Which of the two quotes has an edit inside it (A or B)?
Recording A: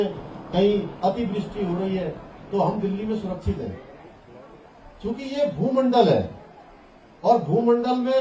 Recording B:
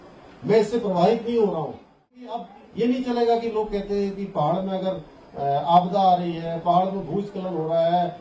B